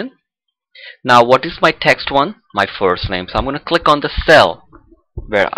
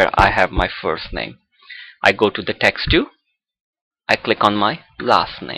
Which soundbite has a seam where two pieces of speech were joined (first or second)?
first